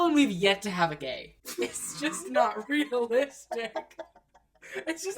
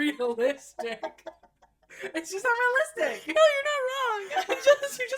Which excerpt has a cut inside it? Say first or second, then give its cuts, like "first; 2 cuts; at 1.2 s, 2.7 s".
first; 1 cut; at 1.3 s